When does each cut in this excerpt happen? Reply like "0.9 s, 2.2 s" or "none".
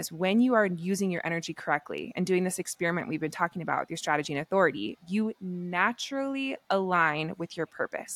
none